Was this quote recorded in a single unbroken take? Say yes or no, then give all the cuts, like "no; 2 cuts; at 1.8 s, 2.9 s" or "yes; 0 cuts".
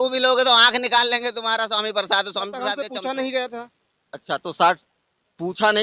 no; 1 cut; at 2.6 s